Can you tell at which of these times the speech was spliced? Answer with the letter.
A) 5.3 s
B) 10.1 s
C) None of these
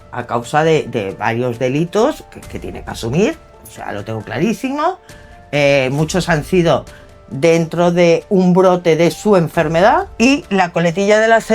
B